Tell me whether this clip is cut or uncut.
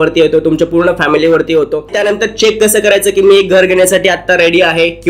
cut